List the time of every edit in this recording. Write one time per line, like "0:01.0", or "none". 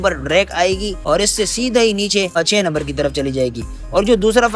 0:00.9
0:02.3